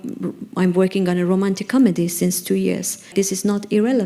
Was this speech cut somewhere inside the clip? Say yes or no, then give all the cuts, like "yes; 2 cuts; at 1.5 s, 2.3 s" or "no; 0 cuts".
yes; 1 cut; at 3.1 s